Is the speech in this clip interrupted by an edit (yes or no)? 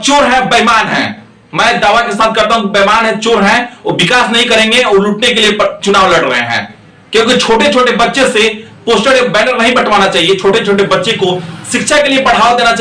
no